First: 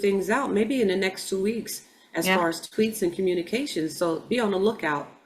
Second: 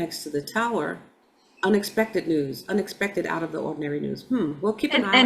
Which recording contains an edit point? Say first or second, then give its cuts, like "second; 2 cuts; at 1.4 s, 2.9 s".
second; 1 cut; at 1.3 s